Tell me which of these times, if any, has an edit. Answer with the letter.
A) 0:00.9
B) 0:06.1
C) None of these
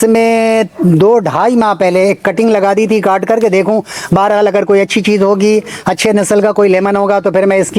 C